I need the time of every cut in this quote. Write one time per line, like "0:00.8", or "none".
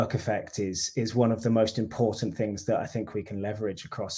none